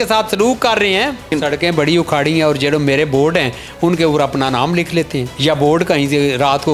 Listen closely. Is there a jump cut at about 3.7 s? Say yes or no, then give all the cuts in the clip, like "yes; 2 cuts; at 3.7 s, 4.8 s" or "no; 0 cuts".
no; 2 cuts; at 1.3 s, 5.3 s